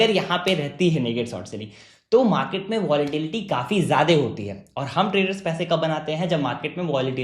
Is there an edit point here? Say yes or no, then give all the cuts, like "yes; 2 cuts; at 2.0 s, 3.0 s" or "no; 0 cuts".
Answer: no; 0 cuts